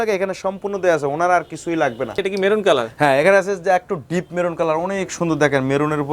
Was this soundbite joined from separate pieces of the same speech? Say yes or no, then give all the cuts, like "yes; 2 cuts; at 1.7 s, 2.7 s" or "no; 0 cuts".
yes; 1 cut; at 2.2 s